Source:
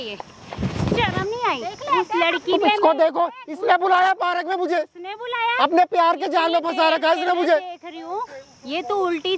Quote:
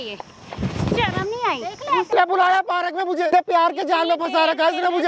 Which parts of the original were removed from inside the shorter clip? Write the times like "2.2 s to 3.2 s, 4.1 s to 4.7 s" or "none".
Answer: 2.1 s to 3.6 s, 4.8 s to 5.8 s